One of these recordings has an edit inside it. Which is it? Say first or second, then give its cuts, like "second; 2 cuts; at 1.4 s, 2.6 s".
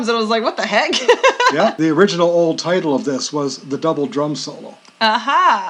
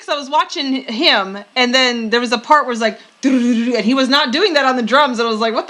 first; 1 cut; at 1.8 s